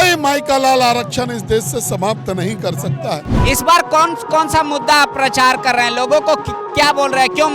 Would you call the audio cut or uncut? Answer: cut